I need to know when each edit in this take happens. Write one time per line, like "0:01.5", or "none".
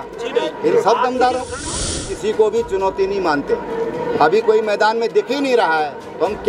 0:01.6